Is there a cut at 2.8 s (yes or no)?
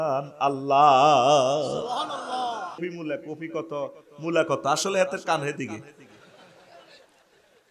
yes